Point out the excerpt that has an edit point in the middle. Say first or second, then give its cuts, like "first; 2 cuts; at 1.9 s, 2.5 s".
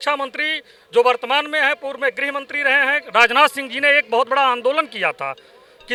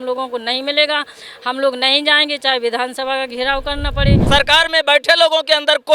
second; 1 cut; at 4.2 s